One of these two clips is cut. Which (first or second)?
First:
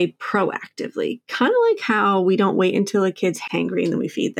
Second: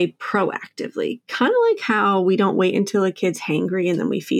first